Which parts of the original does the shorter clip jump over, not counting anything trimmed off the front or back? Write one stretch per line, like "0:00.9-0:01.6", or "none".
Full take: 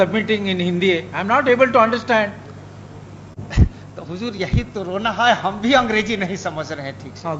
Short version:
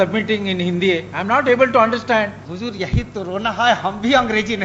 0:02.4-0:04.0